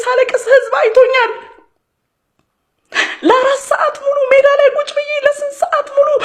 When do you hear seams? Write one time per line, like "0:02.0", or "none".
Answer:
0:05.3